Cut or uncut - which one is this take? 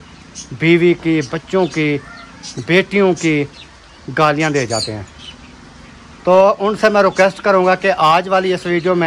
uncut